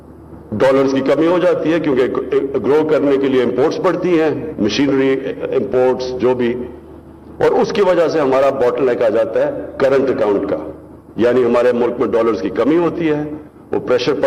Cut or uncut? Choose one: uncut